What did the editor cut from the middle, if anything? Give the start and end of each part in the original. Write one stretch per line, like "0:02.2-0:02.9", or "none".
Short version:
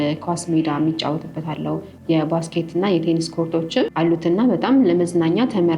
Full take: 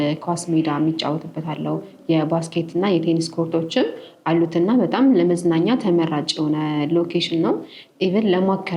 0:03.9-0:04.2